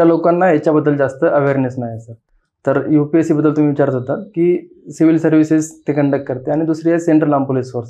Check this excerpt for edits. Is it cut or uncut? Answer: uncut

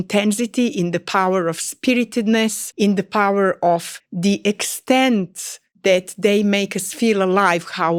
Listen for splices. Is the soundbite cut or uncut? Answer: uncut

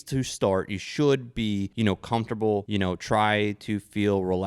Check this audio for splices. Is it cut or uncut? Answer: cut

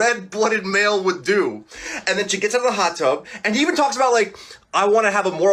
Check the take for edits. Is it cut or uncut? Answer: uncut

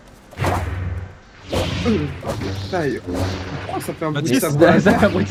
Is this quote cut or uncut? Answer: uncut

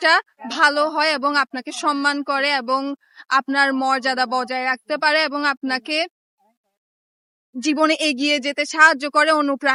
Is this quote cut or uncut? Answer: uncut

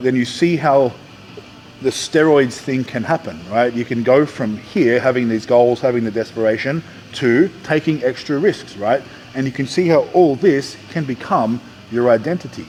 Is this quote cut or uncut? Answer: uncut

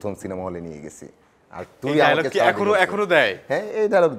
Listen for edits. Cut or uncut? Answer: uncut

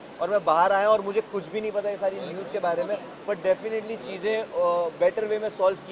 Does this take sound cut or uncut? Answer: uncut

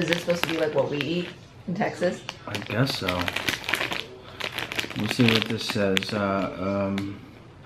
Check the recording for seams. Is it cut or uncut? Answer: cut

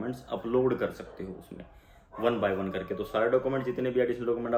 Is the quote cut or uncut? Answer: uncut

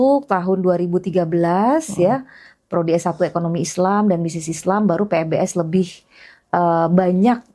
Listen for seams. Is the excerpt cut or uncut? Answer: uncut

